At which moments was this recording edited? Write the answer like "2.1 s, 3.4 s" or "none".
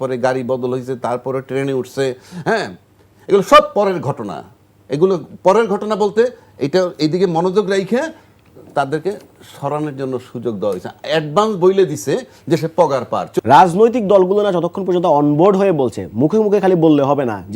13.4 s